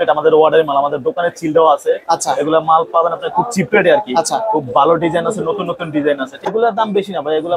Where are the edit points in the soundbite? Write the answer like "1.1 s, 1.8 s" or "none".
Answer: 6.4 s

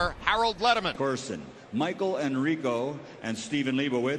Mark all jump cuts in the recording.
none

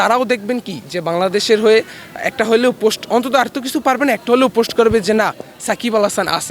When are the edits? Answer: none

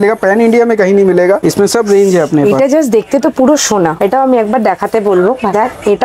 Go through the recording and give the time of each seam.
1.4 s, 3.9 s

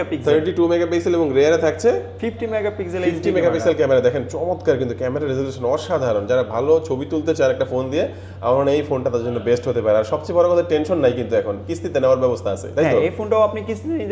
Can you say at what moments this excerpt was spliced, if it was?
none

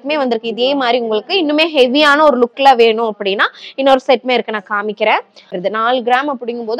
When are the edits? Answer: 5.6 s

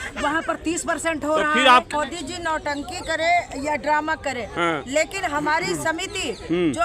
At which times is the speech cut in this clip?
1.9 s

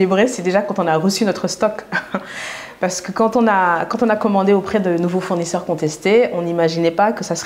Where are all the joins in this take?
none

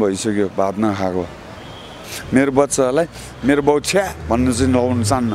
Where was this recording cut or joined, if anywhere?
2.1 s

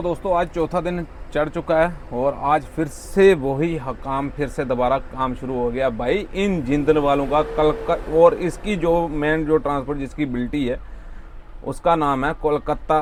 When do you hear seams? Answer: none

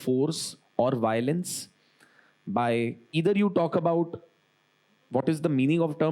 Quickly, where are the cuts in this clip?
3.0 s

